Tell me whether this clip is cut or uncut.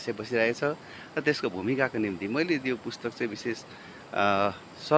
uncut